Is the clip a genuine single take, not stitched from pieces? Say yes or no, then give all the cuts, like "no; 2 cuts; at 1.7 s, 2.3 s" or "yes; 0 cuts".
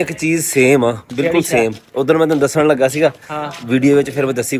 yes; 0 cuts